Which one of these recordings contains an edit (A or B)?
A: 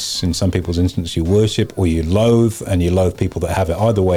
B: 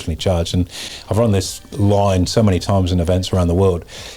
B